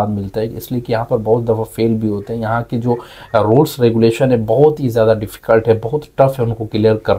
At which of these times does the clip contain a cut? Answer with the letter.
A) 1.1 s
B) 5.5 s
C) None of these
C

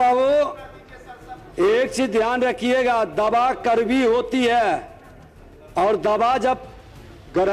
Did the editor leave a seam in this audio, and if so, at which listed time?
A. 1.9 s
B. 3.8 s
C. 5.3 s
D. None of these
D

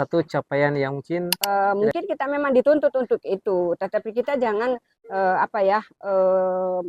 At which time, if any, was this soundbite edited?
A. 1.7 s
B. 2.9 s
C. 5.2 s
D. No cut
A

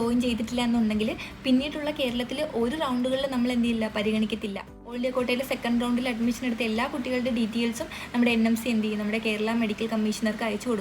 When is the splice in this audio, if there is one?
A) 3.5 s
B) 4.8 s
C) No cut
B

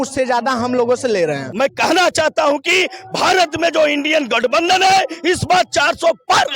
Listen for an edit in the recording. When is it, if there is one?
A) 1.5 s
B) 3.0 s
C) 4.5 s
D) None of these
A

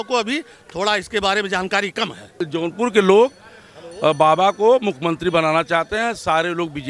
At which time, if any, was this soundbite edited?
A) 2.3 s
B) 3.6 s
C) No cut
A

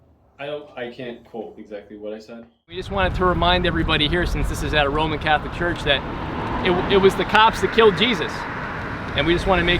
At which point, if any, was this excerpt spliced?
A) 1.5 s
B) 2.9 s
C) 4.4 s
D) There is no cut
B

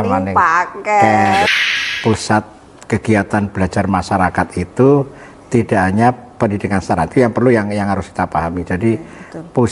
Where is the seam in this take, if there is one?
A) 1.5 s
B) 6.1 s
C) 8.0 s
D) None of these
A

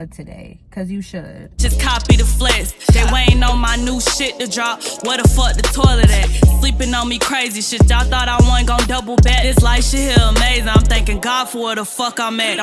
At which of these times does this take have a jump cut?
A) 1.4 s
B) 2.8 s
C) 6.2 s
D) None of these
A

